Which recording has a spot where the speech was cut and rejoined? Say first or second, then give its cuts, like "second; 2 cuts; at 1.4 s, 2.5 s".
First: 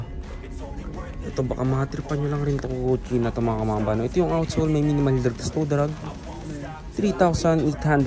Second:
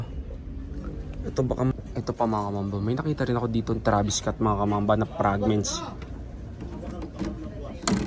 second; 1 cut; at 1.7 s